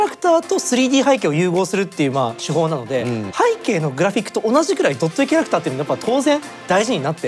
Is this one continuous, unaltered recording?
yes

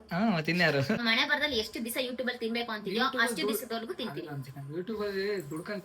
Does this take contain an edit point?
yes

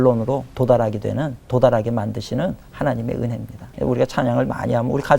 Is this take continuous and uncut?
no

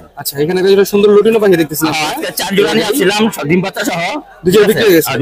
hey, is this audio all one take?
yes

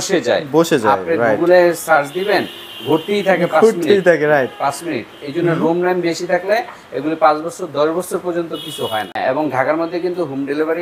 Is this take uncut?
no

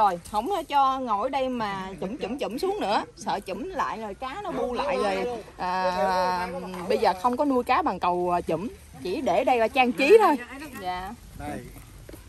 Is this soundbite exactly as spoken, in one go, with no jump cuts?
no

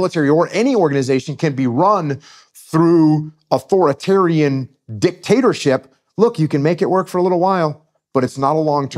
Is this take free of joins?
yes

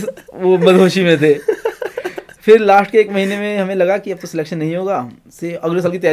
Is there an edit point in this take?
no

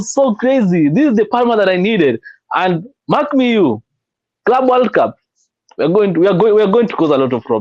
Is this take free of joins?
yes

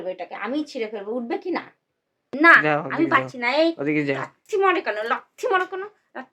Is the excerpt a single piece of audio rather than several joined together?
no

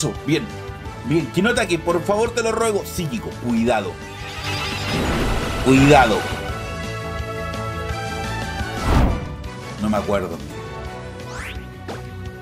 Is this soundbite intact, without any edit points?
no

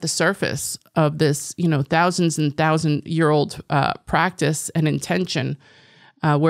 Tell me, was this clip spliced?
no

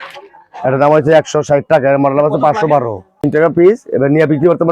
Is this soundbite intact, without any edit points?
no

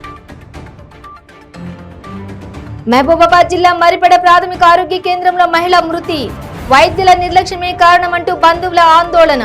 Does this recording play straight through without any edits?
no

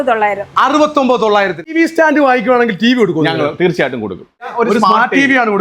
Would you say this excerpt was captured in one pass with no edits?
no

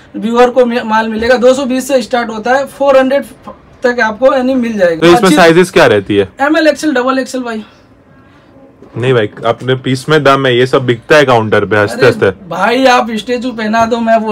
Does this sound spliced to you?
yes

